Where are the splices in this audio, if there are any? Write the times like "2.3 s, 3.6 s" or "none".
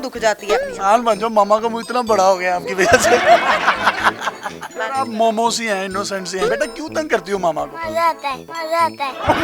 4.6 s